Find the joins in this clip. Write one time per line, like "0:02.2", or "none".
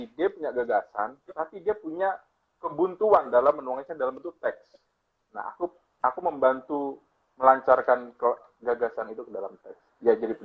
none